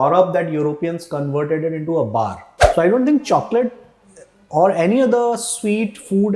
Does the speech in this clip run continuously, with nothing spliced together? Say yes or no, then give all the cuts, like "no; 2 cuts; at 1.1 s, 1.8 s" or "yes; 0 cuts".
no; 1 cut; at 2.6 s